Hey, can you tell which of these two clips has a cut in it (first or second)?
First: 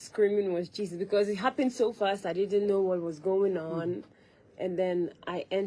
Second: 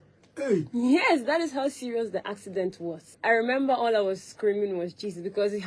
second